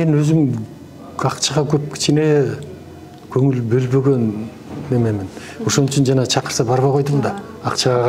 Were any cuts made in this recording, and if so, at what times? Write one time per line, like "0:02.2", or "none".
none